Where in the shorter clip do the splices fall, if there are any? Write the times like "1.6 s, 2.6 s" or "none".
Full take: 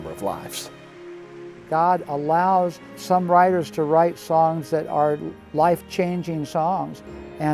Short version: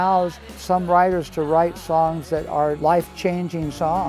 2.8 s